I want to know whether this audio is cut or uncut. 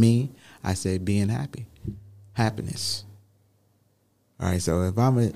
uncut